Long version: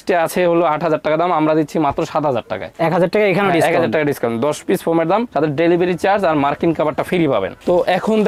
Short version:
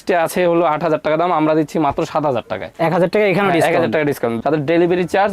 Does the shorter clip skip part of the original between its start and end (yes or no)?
yes